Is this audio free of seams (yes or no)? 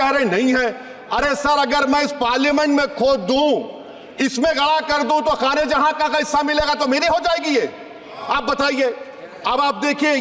yes